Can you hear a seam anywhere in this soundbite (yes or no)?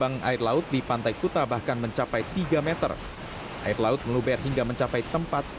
yes